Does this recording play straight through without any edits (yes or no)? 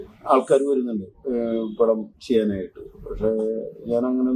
yes